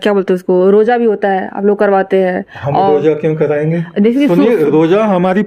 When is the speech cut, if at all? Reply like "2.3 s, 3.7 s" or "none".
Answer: none